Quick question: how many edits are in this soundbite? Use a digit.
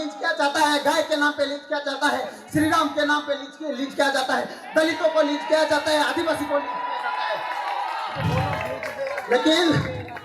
0